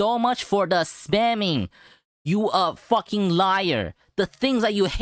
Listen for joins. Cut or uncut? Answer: uncut